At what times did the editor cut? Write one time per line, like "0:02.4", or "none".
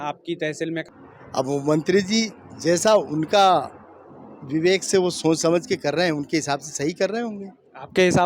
0:00.9